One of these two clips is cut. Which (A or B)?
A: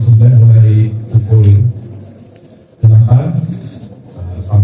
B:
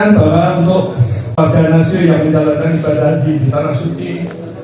B